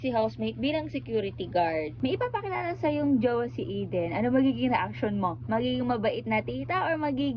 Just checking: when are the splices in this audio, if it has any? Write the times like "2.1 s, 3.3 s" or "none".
1.9 s